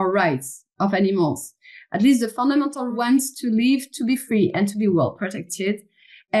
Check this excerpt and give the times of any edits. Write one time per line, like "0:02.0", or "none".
0:02.9